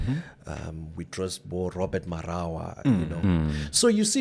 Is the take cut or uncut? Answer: cut